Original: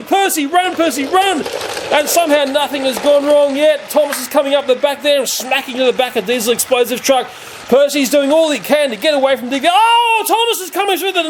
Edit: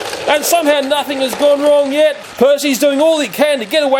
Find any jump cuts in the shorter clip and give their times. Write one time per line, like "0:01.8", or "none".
0:02.2